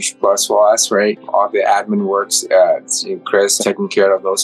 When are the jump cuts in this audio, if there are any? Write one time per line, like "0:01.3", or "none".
0:01.2